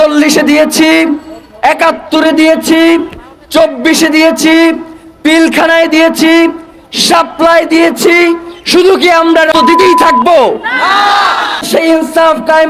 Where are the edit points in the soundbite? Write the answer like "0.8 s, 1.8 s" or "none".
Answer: 9.6 s, 11.7 s